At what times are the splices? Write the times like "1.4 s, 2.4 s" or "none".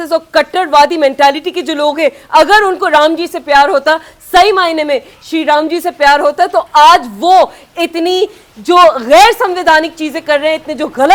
none